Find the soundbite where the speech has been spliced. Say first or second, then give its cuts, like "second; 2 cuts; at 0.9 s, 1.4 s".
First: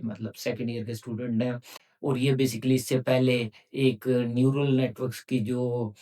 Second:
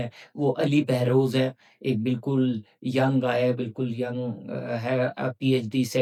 first; 1 cut; at 1.8 s